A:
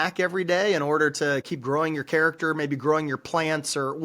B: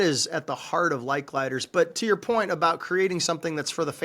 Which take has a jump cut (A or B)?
A